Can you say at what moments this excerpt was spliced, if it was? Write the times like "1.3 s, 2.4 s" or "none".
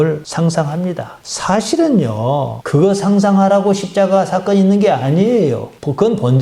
none